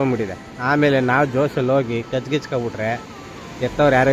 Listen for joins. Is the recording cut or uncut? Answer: uncut